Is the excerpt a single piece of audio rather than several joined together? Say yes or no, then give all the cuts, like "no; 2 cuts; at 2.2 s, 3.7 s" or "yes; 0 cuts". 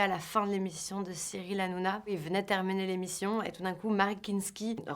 no; 1 cut; at 2.1 s